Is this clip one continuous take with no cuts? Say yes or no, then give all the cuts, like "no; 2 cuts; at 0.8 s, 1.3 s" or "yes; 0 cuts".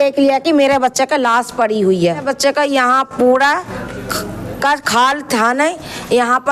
no; 1 cut; at 2.2 s